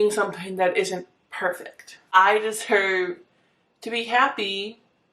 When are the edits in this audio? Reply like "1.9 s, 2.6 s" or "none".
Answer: 2.2 s